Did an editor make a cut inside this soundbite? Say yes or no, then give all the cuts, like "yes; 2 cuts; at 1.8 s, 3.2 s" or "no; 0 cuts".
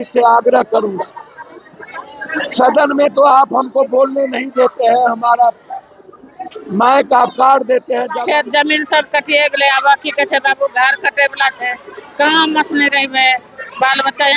yes; 1 cut; at 8.1 s